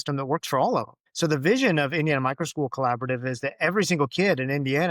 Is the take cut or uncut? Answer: cut